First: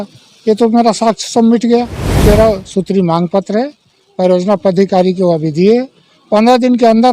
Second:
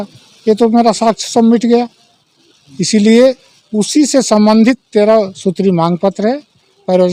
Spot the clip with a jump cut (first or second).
first